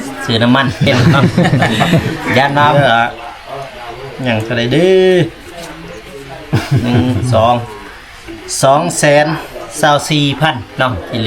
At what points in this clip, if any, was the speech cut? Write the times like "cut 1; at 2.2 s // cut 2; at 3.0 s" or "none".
cut 1; at 2.7 s